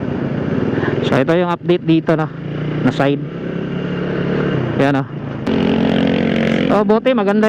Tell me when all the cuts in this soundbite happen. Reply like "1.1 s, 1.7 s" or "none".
5.5 s

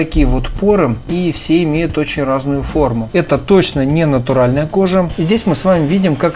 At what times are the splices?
1.0 s, 3.1 s, 5.1 s

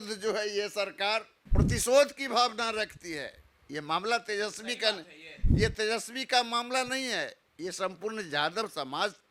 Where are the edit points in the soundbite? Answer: 1.4 s

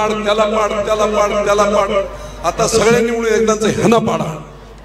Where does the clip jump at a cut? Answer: none

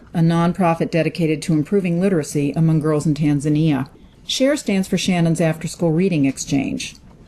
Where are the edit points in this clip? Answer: 4.8 s

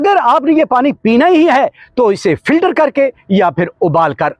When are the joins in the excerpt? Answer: none

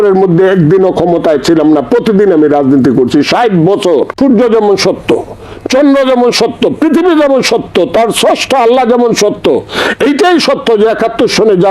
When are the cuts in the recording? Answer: 4.1 s

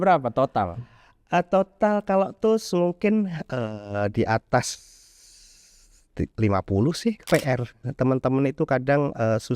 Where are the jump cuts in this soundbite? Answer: 7.2 s

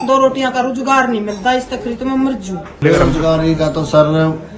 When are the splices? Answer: 2.7 s

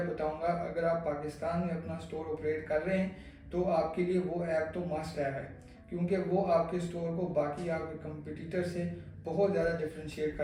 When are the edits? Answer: none

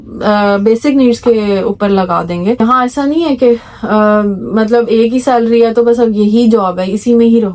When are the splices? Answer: 2.6 s

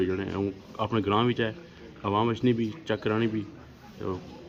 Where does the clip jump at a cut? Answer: none

